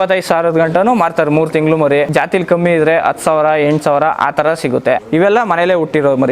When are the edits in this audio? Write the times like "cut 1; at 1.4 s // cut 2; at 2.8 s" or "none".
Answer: cut 1; at 2.1 s // cut 2; at 5.0 s